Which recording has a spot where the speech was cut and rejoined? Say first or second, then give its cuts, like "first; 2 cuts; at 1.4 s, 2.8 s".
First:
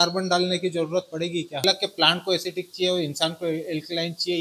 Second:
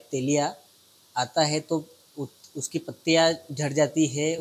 first; 1 cut; at 1.6 s